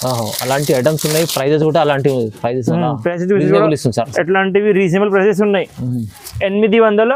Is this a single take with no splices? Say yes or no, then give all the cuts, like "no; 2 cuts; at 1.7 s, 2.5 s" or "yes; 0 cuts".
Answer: yes; 0 cuts